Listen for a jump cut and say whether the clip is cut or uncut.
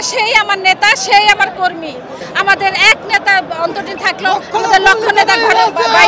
cut